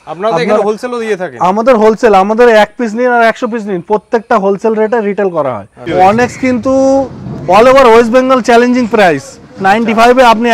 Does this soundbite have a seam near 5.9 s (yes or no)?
yes